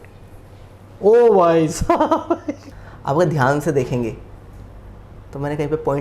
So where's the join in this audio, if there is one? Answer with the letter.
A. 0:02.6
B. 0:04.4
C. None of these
A